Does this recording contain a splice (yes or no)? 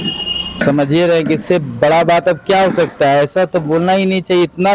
no